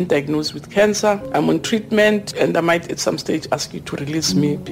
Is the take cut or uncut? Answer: cut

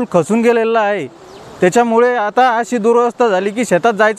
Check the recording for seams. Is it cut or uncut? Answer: uncut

